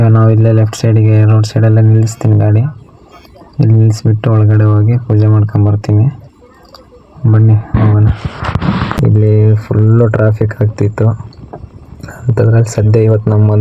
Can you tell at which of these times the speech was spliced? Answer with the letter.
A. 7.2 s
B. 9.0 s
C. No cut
B